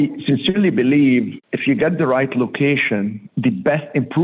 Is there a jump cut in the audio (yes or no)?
yes